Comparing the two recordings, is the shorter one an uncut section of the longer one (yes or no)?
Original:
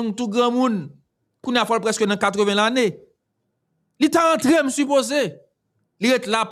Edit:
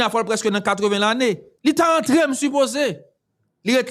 no